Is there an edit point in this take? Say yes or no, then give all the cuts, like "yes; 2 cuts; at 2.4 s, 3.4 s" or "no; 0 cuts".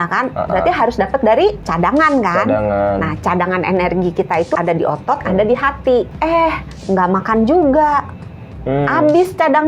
yes; 3 cuts; at 1.7 s, 4.5 s, 6.1 s